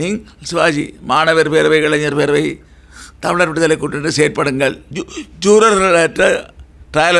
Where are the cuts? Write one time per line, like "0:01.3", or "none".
0:04.9